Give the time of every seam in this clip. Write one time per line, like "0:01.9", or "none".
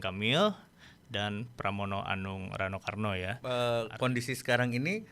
0:03.3